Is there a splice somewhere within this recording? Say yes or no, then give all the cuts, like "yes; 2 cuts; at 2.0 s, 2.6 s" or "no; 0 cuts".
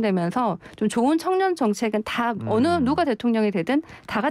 no; 0 cuts